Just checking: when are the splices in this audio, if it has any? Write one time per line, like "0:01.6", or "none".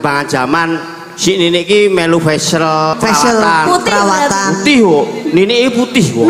0:02.9